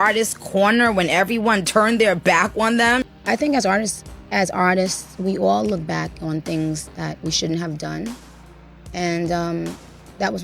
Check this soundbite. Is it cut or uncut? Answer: cut